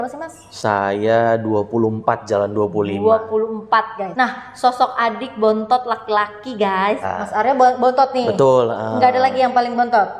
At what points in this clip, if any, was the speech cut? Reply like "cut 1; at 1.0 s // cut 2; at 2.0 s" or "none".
cut 1; at 4.0 s // cut 2; at 7.0 s